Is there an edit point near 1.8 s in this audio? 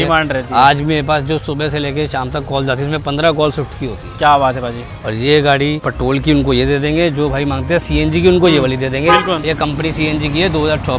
no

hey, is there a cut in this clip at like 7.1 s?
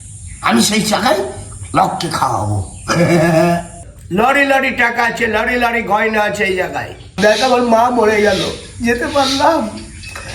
yes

